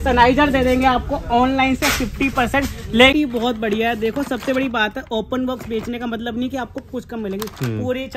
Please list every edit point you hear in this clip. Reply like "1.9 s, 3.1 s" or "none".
3.1 s